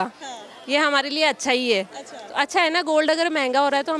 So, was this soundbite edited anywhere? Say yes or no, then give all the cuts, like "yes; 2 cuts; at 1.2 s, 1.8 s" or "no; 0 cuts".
no; 0 cuts